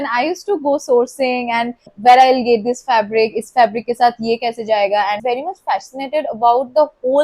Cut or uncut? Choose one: cut